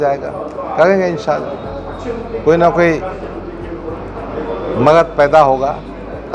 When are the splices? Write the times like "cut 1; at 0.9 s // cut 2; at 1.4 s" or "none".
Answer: none